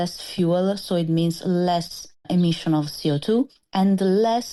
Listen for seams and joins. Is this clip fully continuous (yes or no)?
yes